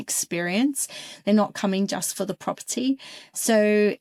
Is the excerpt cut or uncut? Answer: uncut